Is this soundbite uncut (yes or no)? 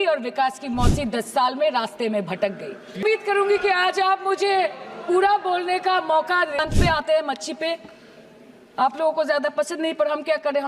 no